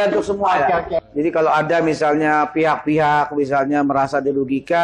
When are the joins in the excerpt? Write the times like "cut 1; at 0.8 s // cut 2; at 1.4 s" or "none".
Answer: cut 1; at 1.1 s